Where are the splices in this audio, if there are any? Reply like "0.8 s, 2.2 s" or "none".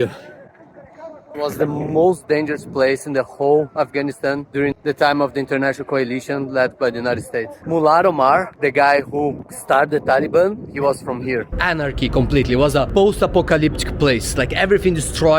1.3 s, 7.6 s, 11.5 s

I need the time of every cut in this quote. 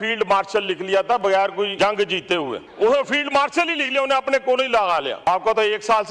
1.7 s, 2.6 s, 5.3 s

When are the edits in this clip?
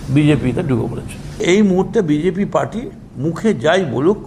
none

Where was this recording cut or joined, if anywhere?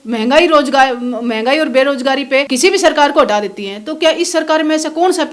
2.5 s

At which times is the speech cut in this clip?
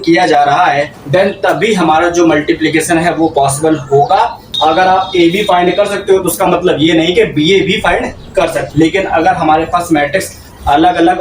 1.0 s, 4.4 s, 8.6 s

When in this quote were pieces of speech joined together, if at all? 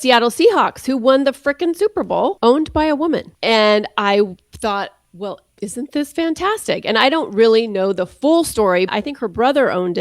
2.4 s, 3.3 s, 8.9 s

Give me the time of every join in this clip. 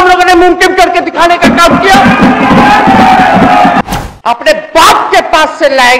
3.8 s

